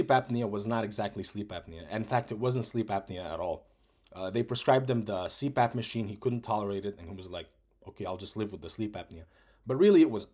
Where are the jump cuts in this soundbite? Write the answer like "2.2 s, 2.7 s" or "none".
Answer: none